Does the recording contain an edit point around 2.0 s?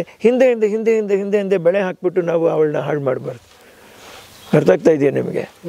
no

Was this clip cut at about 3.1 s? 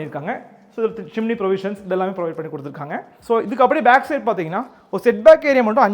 yes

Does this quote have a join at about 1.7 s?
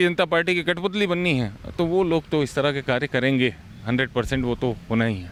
no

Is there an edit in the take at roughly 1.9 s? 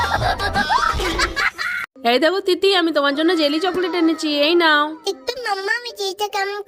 yes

